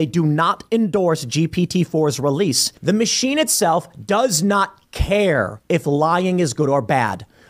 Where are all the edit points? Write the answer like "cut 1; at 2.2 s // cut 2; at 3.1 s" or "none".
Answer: cut 1; at 2.7 s